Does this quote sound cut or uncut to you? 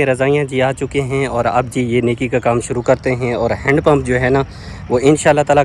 uncut